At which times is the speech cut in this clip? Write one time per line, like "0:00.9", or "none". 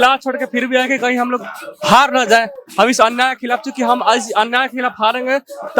none

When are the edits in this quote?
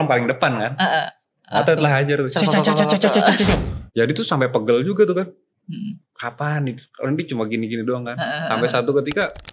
0:03.6

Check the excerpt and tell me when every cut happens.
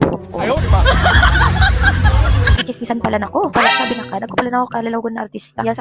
0:02.6

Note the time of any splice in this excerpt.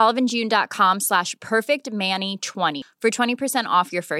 none

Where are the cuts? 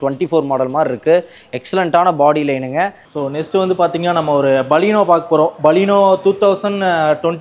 0:03.0

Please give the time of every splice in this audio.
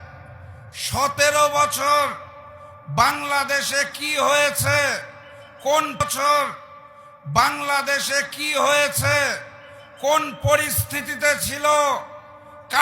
0:06.0

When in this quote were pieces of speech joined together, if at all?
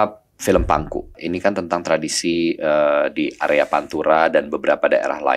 0:01.2

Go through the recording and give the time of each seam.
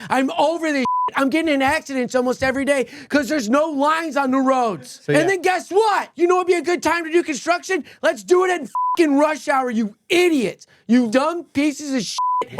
0:04.9
0:06.1
0:11.1

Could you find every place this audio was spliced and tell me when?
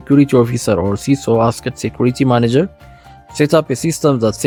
none

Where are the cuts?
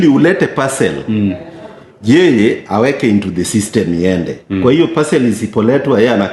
none

